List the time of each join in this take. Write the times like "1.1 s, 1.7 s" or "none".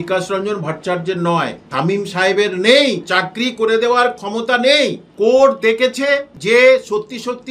1.6 s, 5.0 s, 6.3 s

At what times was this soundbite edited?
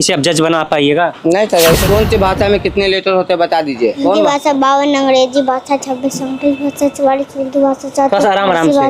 1.8 s, 4.0 s

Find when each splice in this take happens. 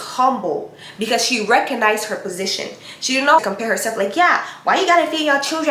3.4 s

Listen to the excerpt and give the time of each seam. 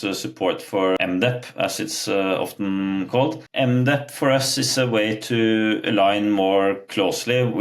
1.0 s, 3.4 s

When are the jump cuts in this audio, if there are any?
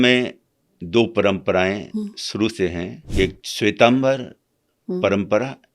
3.0 s

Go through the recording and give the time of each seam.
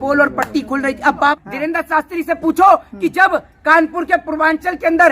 1.3 s

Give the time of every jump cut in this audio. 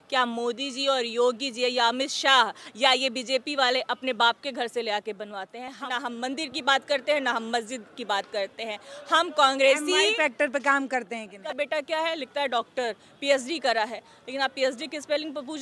5.8 s, 11.4 s

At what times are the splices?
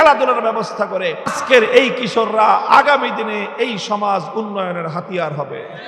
1.4 s

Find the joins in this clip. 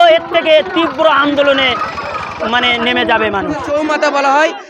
3.7 s

